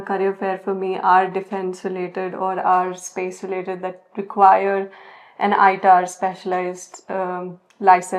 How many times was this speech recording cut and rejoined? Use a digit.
0